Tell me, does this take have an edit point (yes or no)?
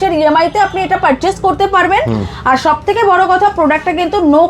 no